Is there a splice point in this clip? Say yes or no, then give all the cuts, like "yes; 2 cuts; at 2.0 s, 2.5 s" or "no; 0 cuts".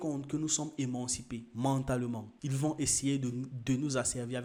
no; 0 cuts